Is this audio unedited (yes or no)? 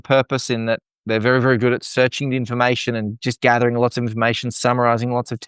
yes